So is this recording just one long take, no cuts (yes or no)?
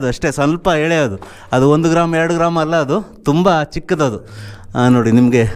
yes